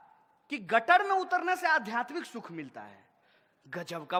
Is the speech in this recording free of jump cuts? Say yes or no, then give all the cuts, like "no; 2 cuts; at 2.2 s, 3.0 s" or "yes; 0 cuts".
yes; 0 cuts